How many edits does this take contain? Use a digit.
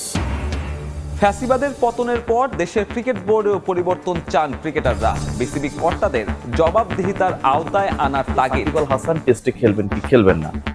2